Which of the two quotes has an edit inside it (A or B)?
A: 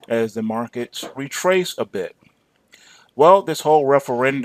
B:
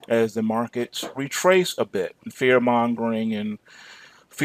A